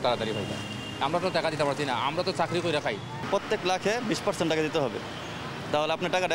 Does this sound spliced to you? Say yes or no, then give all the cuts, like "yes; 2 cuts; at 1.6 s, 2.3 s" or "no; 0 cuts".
no; 0 cuts